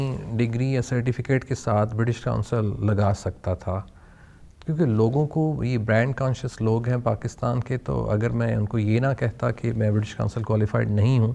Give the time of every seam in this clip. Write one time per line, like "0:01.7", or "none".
none